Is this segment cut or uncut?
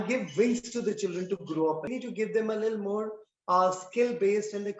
cut